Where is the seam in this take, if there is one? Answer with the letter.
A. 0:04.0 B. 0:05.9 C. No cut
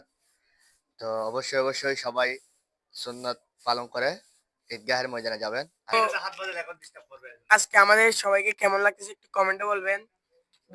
B